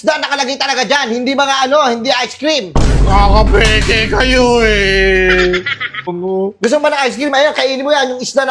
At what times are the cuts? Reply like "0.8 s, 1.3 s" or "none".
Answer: 6.1 s